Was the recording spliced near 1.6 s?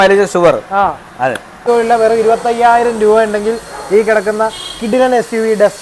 yes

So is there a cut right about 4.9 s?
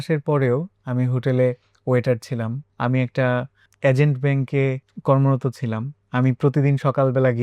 yes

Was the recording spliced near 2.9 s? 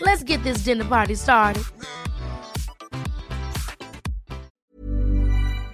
no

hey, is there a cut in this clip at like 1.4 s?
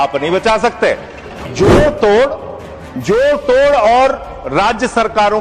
yes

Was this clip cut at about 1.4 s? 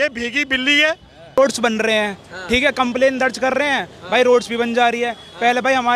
yes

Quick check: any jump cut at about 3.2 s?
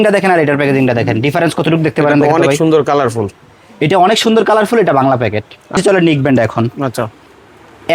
no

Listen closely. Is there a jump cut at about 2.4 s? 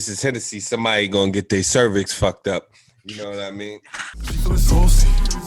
no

